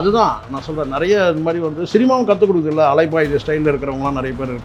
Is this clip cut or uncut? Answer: uncut